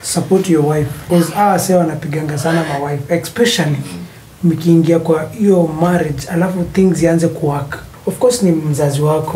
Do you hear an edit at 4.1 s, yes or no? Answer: no